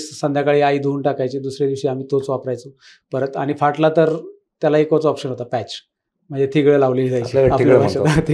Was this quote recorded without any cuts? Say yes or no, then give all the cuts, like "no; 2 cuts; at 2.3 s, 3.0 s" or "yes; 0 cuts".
yes; 0 cuts